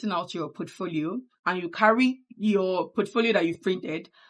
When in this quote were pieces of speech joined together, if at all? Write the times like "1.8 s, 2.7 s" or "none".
1.3 s, 2.3 s